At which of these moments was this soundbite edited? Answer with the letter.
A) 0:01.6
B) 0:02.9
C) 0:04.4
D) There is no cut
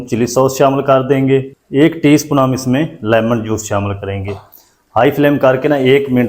A